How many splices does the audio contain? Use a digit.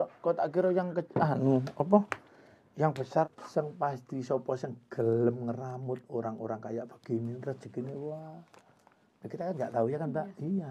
1